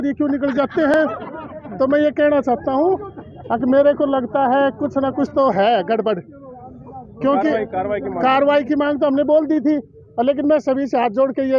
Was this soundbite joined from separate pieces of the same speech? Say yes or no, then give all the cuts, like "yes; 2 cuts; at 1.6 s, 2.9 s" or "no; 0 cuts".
no; 0 cuts